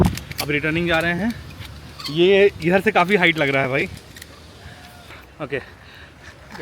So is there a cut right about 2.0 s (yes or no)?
no